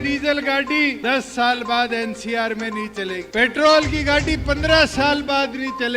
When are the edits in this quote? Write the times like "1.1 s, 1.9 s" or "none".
1.0 s, 3.3 s